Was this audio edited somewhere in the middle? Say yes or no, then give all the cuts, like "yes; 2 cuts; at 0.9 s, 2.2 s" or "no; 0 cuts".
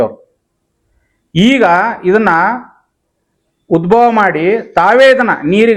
no; 0 cuts